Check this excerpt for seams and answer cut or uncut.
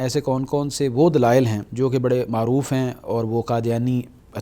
cut